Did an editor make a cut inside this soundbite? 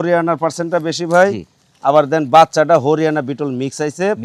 no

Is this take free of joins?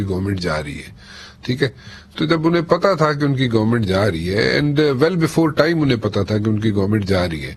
yes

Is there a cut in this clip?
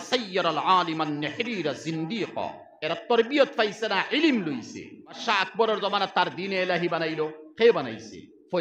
yes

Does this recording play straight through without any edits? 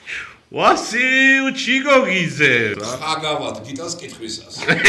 no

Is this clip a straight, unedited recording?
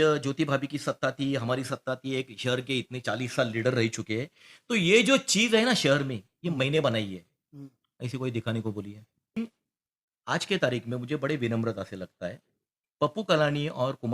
no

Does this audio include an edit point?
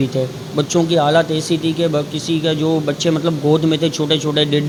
no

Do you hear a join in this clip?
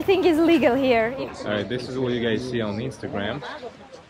yes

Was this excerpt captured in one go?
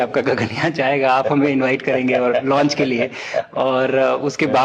yes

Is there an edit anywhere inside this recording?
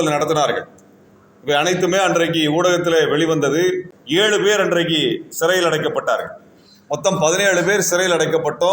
yes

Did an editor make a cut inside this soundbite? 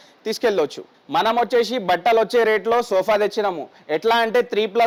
no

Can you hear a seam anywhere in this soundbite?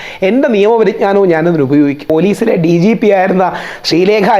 yes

